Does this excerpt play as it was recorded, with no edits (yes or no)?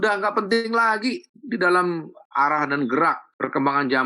no